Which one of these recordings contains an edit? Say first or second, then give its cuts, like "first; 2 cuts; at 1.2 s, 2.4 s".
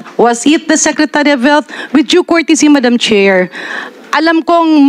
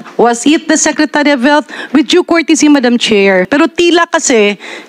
second; 1 cut; at 3.5 s